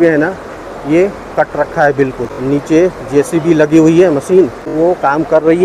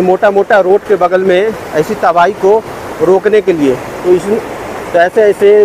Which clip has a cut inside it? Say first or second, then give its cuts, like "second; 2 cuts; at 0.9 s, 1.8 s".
first; 2 cuts; at 2.3 s, 4.6 s